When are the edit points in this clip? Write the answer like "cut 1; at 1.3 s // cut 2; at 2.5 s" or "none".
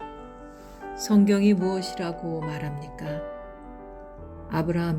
cut 1; at 1.1 s

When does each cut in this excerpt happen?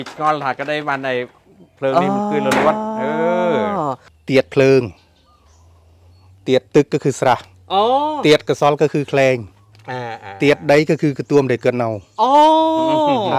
cut 1; at 4.1 s

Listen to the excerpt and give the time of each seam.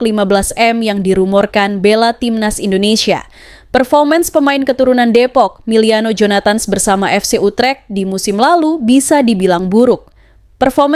none

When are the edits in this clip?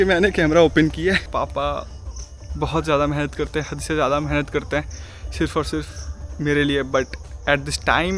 cut 1; at 1.3 s

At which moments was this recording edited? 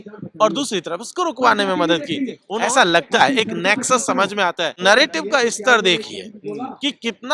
cut 1; at 2.4 s // cut 2; at 4.8 s

